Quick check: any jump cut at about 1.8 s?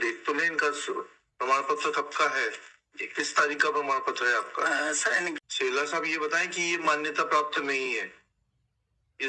no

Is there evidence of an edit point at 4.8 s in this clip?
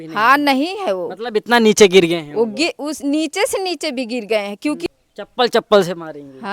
yes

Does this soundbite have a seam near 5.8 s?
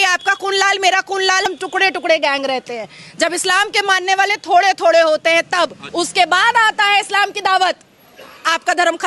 yes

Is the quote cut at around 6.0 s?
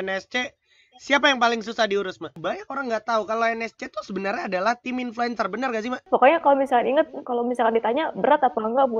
yes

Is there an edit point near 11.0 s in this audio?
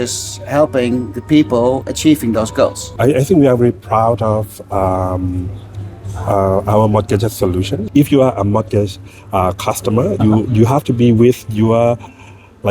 no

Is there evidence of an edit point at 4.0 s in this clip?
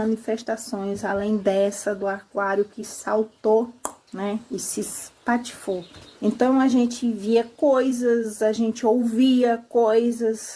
yes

